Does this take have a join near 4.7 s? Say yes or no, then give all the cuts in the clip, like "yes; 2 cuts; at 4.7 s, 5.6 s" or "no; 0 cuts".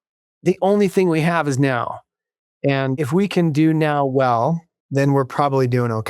yes; 2 cuts; at 3.0 s, 4.7 s